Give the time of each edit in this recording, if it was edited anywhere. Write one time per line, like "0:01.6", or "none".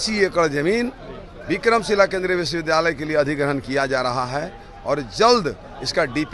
none